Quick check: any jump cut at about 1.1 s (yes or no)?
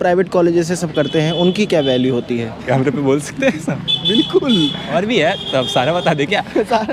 no